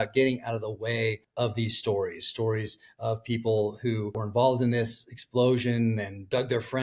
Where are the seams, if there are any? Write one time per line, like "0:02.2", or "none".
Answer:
0:01.2
0:04.2